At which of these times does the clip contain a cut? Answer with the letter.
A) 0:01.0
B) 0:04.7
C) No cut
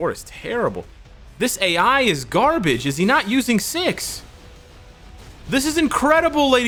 C